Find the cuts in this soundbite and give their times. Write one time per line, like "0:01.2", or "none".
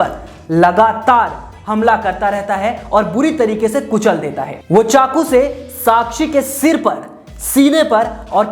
0:04.5